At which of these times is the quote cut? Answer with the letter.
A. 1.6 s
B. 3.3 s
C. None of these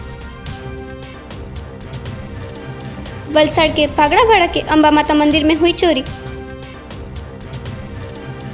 A